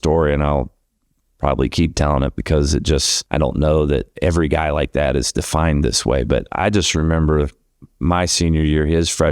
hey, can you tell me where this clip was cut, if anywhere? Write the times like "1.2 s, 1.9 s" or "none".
3.2 s, 4.1 s